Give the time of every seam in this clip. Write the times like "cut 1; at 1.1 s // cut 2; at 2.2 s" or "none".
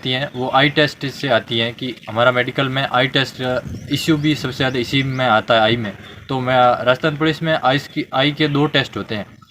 none

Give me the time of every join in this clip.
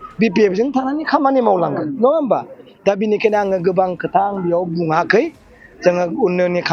none

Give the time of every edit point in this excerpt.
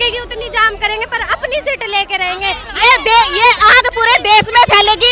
cut 1; at 2.7 s

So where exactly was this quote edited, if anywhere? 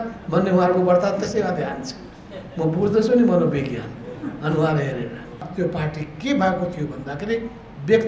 cut 1; at 5.5 s

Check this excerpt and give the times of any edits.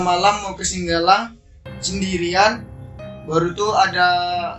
none

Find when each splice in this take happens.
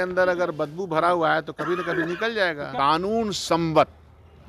cut 1; at 2.6 s

